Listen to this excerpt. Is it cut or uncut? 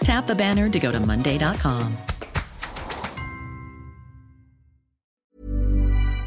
cut